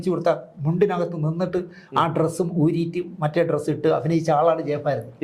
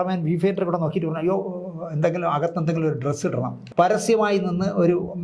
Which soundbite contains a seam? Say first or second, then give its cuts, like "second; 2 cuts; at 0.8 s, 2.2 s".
second; 1 cut; at 3.6 s